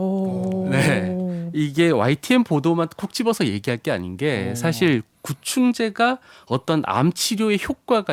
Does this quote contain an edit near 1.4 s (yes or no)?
no